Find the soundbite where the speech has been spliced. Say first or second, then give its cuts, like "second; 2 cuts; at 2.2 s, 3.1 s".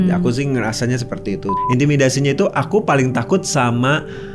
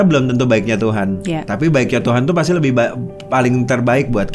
first; 1 cut; at 1.5 s